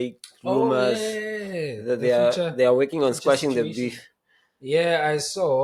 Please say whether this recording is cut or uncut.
uncut